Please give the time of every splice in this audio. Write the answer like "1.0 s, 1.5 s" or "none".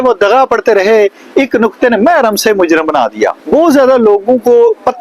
3.4 s

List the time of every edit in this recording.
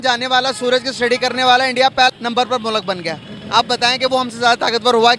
2.1 s

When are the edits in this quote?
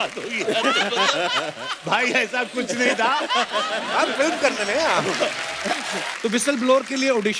6.1 s

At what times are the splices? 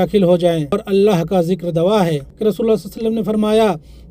0.8 s, 2.3 s

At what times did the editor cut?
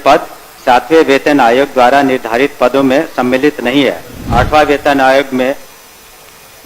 4.3 s

